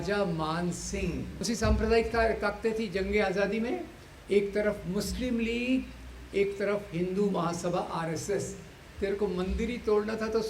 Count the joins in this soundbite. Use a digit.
2